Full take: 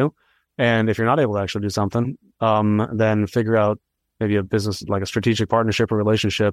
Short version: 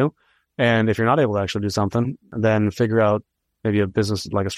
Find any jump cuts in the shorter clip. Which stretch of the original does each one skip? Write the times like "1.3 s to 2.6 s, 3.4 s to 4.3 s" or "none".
2.3 s to 2.9 s